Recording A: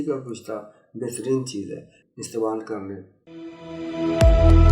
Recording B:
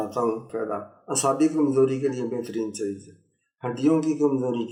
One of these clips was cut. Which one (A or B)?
A